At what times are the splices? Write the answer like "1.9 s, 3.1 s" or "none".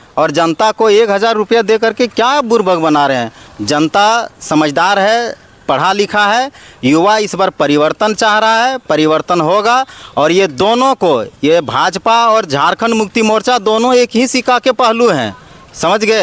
none

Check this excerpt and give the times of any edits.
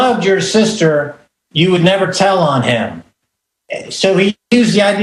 0.9 s

